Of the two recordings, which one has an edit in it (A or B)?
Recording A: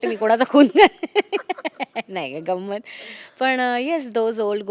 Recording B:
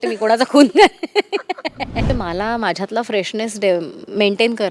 B